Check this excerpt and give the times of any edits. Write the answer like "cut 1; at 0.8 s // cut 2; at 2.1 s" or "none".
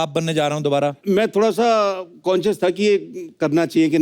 cut 1; at 1.0 s